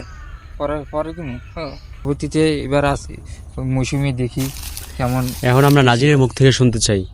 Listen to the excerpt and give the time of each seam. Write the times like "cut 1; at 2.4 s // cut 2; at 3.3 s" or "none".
cut 1; at 2.1 s